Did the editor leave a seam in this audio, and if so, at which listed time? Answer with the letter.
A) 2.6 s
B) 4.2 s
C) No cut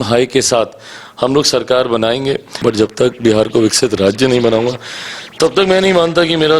A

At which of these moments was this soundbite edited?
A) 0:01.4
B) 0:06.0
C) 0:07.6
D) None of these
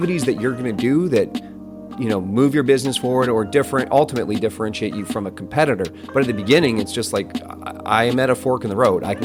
D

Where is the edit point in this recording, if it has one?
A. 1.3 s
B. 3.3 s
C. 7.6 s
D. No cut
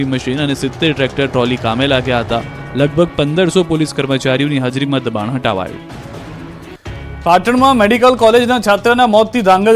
B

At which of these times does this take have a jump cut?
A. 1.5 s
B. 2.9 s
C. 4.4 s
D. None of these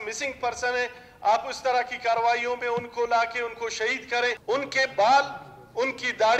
C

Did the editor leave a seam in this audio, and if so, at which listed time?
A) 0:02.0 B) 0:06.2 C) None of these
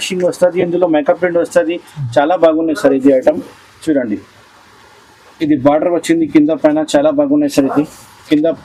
C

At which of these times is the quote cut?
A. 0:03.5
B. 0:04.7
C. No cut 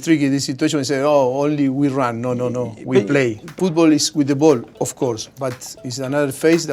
A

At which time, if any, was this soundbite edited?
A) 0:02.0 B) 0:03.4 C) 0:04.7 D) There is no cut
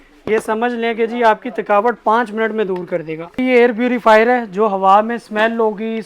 B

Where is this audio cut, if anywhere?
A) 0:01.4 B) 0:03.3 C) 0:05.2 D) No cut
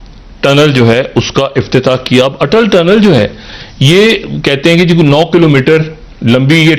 D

